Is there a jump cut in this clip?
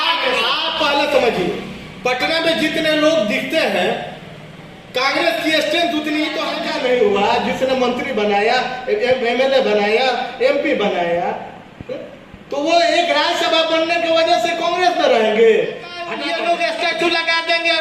yes; 2 cuts; at 6.5 s, 16.3 s

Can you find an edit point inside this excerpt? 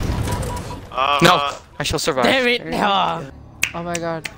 yes; 1 cut; at 3.4 s

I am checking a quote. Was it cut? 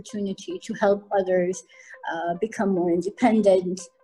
no; 0 cuts

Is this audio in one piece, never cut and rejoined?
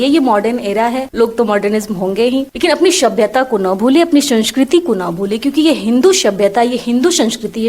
no; 2 cuts; at 1.1 s, 2.5 s

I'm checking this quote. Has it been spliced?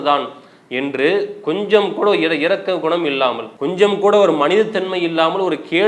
yes; 1 cut; at 3.5 s

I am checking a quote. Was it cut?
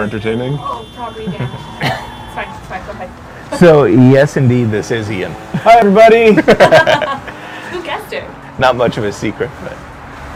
no; 0 cuts

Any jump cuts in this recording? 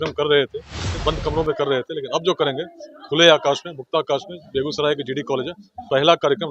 yes; 1 cut; at 0.9 s

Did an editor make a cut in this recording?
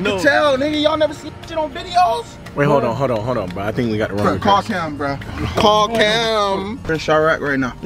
yes; 1 cut; at 6.8 s

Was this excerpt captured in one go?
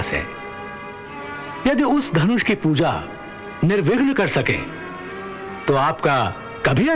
yes; 0 cuts

